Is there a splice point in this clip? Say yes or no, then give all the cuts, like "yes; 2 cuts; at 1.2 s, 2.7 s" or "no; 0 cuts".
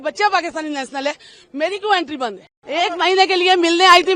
yes; 1 cut; at 2.5 s